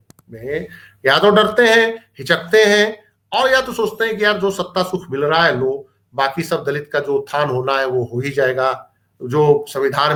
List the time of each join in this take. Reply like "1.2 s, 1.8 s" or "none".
none